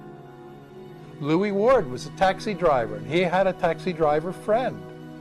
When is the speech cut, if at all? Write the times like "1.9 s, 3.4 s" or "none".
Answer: none